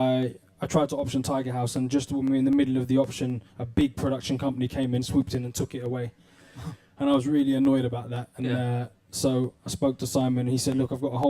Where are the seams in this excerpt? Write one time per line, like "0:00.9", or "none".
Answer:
0:07.5